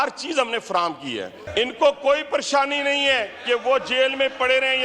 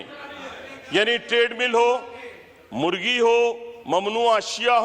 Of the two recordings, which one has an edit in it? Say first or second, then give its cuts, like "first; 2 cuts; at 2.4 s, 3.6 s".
first; 1 cut; at 1.4 s